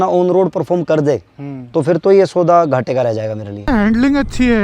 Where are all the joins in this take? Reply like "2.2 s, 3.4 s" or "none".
3.7 s